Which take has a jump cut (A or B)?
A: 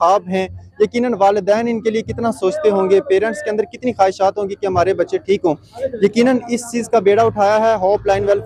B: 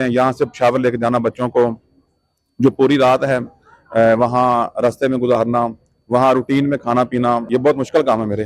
B